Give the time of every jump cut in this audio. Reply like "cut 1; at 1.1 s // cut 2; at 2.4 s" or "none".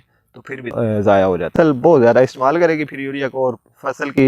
cut 1; at 1.5 s